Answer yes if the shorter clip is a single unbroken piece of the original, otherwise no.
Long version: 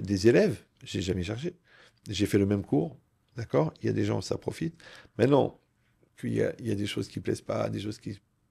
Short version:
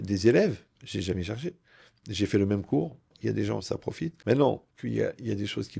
no